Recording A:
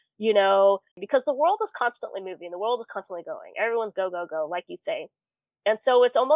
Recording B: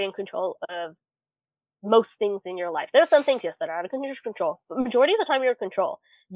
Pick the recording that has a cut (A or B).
A